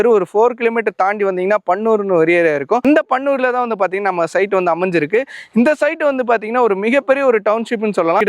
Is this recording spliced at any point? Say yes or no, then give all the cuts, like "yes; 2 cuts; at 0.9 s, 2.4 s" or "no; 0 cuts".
no; 0 cuts